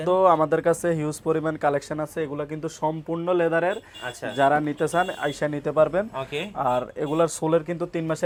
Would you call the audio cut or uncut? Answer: uncut